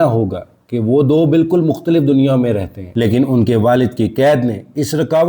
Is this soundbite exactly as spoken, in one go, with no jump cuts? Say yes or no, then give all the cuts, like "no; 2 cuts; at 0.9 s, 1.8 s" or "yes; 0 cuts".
no; 1 cut; at 2.9 s